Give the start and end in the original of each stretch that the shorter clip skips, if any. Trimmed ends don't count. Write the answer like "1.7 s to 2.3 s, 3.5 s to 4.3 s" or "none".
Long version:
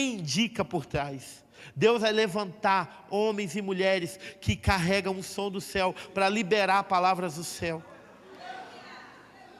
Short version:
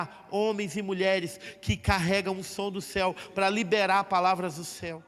none